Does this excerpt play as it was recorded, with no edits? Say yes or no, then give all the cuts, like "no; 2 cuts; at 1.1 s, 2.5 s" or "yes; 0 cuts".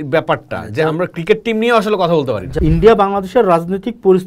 no; 1 cut; at 2.5 s